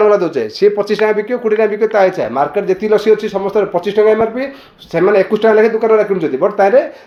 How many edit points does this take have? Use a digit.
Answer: 0